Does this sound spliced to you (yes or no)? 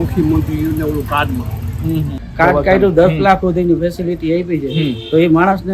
yes